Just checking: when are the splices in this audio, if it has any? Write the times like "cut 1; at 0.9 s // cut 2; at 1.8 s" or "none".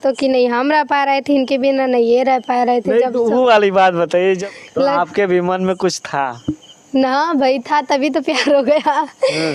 cut 1; at 4.4 s